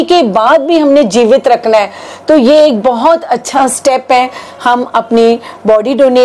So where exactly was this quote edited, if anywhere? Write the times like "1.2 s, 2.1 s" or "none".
none